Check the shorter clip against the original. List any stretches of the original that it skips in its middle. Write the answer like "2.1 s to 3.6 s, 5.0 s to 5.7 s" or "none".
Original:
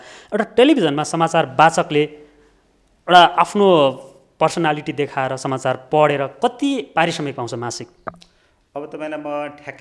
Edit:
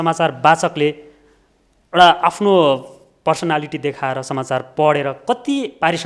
none